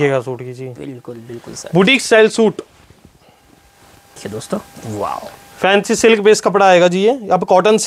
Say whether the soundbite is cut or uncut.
cut